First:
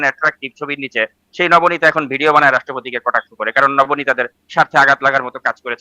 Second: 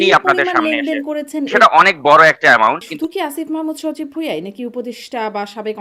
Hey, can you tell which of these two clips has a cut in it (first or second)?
second